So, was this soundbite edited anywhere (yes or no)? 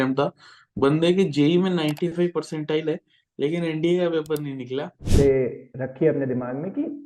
yes